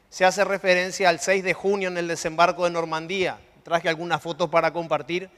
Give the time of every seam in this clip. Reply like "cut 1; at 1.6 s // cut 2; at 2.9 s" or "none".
cut 1; at 3.8 s